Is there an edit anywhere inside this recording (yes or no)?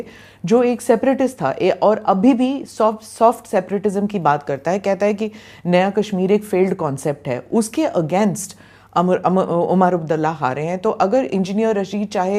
no